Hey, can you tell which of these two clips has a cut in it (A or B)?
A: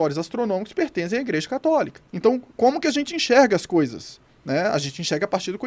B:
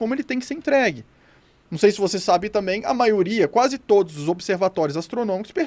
A